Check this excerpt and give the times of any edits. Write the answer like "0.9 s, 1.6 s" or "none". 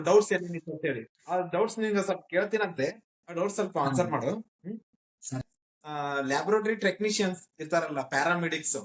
5.4 s